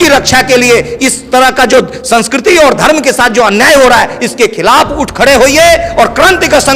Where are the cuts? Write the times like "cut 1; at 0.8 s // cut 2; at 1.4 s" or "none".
none